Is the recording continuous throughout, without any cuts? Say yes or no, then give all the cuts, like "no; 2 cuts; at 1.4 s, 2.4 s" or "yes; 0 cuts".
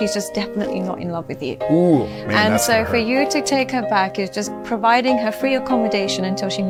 yes; 0 cuts